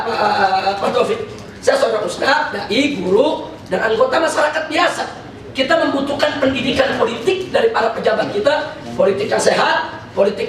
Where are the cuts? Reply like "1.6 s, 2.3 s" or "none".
1.3 s